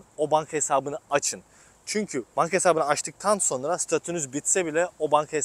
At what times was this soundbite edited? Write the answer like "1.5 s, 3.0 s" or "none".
none